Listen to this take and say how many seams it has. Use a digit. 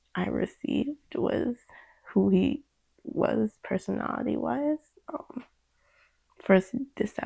0